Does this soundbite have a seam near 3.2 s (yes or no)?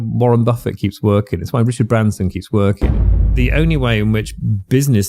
yes